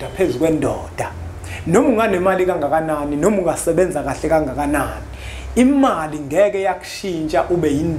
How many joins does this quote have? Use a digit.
0